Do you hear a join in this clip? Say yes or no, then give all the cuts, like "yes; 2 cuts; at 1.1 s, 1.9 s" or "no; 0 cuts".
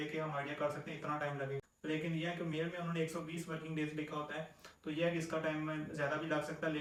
no; 0 cuts